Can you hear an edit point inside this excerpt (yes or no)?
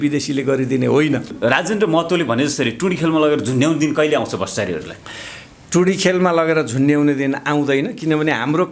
yes